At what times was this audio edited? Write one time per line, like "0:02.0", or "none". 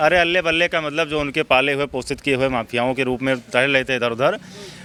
none